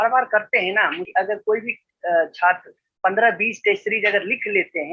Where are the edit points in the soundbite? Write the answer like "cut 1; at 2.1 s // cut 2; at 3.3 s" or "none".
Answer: cut 1; at 1.0 s